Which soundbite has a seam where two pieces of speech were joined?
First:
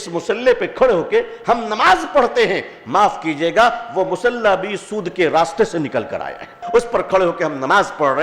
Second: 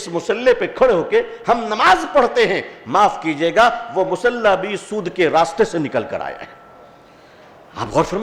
first; 1 cut; at 6.6 s

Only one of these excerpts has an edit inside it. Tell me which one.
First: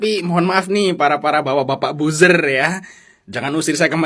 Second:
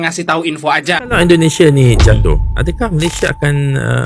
second; 1 cut; at 1.2 s

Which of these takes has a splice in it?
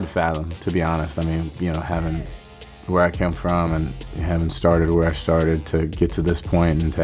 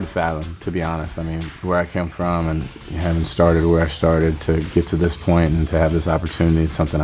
second; 1 cut; at 1.5 s

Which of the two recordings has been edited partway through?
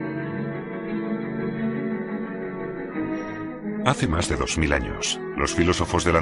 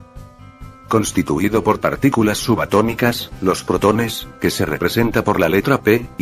second; 1 cut; at 5.1 s

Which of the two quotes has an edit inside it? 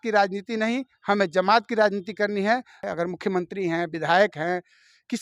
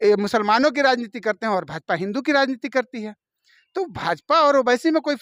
first; 1 cut; at 2.7 s

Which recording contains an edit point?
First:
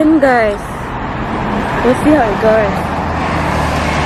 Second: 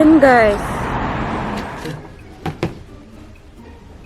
second; 1 cut; at 1.5 s

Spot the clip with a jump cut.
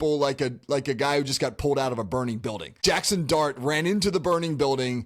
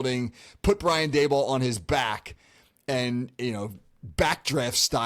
first; 1 cut; at 2.8 s

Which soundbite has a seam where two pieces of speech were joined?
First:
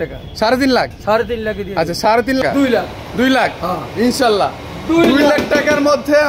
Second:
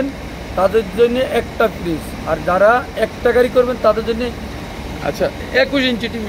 first; 1 cut; at 2.4 s

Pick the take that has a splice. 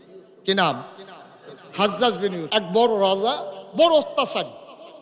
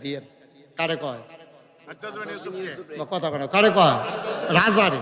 first; 1 cut; at 2.4 s

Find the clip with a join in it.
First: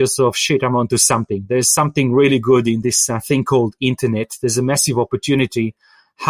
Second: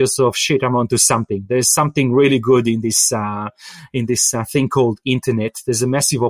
first; 1 cut; at 2.8 s

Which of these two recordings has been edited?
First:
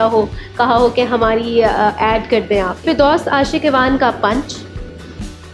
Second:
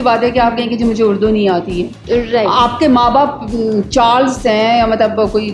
first; 1 cut; at 2.8 s

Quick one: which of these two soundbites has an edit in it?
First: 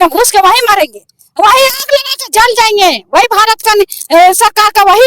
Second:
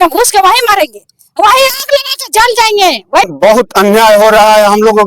second; 1 cut; at 3.3 s

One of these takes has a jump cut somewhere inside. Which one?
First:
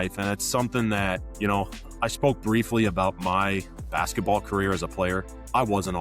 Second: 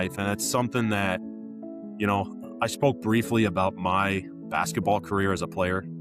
first; 1 cut; at 1.3 s

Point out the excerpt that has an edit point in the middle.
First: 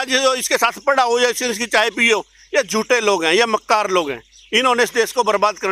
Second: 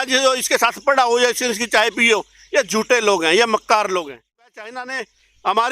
second; 1 cut; at 4.5 s

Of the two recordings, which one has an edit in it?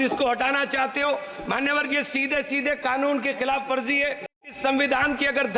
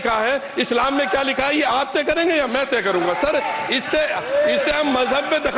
first; 1 cut; at 4.5 s

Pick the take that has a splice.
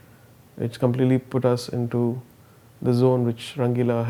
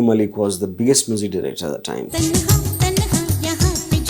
second; 1 cut; at 2.1 s

